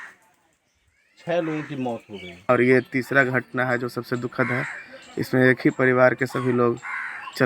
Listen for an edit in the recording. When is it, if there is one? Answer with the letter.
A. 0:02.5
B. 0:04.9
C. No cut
A